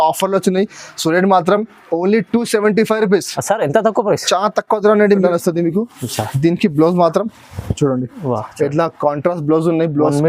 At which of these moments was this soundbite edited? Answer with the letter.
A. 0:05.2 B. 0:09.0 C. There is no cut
A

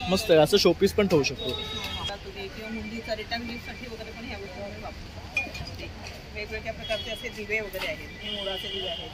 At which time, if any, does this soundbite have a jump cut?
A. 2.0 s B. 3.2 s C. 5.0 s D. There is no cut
A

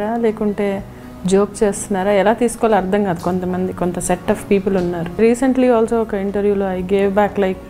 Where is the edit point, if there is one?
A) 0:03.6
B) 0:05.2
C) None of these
B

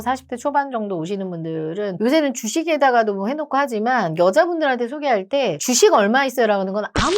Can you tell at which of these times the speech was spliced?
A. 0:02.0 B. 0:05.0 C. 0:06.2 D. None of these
A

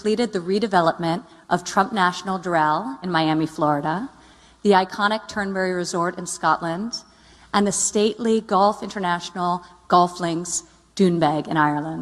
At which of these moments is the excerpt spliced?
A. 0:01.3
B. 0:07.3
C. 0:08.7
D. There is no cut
C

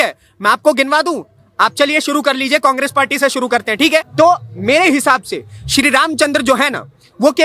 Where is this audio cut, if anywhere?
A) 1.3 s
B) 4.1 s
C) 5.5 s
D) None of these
B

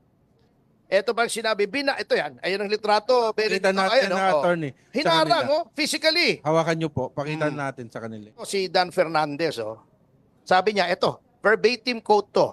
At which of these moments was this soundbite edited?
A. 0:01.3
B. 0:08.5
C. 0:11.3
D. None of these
B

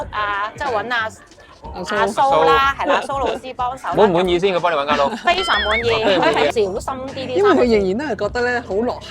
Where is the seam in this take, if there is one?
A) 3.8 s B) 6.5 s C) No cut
B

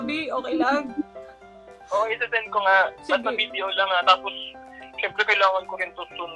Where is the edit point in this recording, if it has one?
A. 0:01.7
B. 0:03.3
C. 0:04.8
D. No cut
D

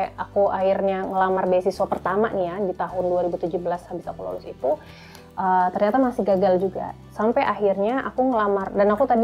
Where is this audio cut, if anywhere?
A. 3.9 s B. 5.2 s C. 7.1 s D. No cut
D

